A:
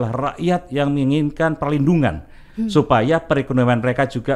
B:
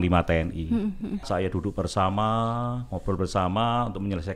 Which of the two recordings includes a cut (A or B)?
B